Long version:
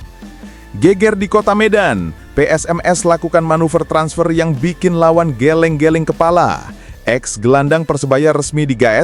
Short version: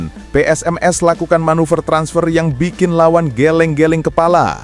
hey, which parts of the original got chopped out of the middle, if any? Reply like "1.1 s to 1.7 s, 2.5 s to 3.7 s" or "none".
none